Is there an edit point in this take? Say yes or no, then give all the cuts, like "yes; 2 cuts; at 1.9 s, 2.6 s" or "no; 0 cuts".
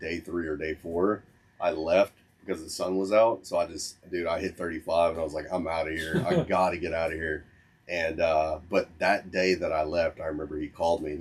no; 0 cuts